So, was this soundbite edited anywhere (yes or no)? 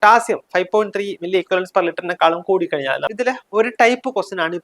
yes